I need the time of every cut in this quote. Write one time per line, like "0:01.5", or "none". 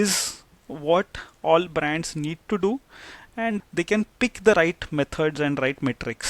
0:03.6

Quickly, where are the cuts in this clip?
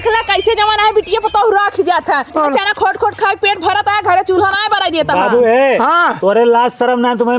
0:02.3

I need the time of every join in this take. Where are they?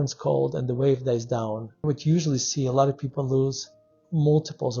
0:01.8

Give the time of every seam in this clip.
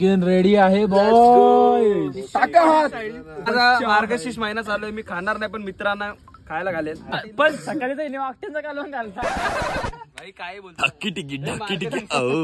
0:03.5
0:07.2
0:10.8

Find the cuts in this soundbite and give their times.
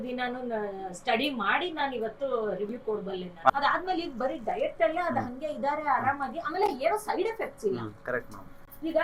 0:03.5

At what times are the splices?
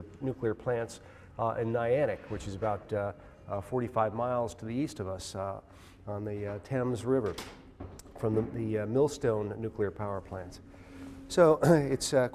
0:03.9

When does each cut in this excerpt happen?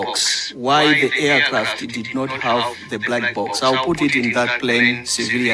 none

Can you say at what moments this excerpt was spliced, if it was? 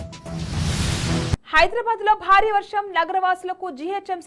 0:01.3

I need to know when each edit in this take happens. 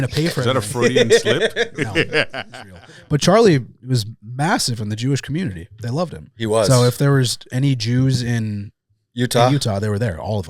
0:02.7

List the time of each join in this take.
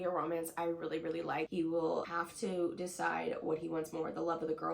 0:01.5
0:02.1

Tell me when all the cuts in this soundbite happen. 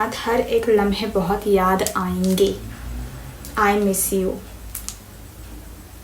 none

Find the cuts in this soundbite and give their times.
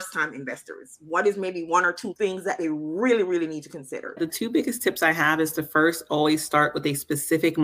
0:02.1
0:04.2

